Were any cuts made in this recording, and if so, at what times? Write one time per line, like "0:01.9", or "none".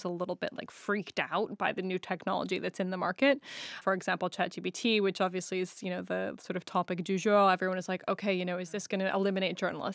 0:03.8